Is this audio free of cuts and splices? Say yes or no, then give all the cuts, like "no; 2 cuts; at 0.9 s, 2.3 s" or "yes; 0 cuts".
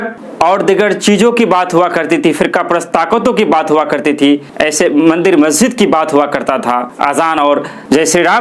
yes; 0 cuts